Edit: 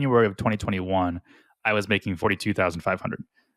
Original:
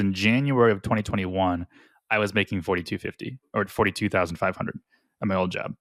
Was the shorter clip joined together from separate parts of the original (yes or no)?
yes